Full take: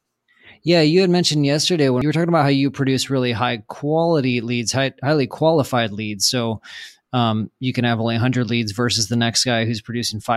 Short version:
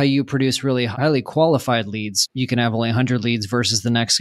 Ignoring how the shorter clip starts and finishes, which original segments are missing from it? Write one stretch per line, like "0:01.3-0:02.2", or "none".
0:03.4-0:05.0
0:06.3-0:07.5